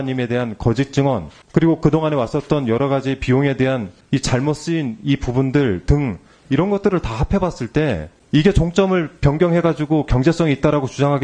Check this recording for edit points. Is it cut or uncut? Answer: cut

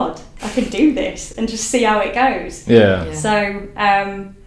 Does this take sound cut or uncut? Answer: uncut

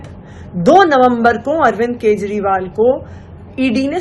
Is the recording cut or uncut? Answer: uncut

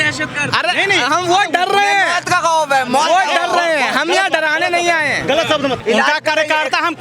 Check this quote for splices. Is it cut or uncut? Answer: cut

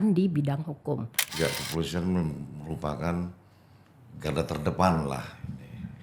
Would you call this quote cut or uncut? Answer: cut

